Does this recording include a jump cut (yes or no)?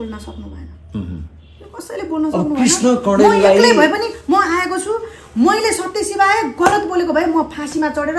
no